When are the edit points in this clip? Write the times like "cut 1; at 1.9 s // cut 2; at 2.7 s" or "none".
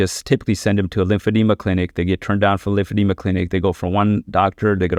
none